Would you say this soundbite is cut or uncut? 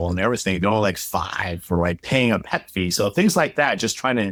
uncut